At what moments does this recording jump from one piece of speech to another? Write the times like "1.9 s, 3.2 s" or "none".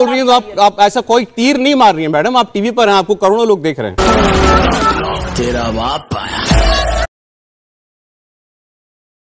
none